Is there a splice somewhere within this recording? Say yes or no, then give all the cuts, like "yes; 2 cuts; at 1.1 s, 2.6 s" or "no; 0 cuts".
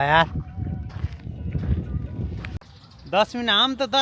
yes; 1 cut; at 2.5 s